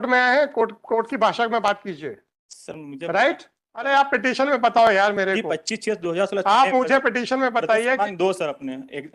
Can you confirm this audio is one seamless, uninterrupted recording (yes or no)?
no